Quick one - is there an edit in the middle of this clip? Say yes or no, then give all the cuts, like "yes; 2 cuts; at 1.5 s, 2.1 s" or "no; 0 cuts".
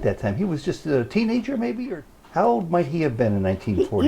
yes; 1 cut; at 1.9 s